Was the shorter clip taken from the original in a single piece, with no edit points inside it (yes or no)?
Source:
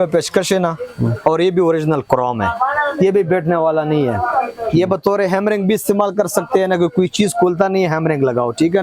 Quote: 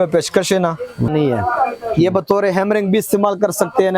no